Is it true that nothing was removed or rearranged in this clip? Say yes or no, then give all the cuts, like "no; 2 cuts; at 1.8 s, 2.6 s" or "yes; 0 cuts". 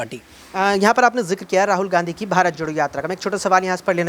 yes; 0 cuts